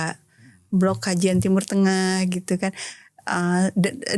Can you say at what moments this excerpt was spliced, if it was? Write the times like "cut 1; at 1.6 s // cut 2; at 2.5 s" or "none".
none